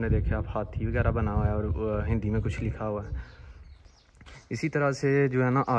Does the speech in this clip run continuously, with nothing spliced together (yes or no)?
yes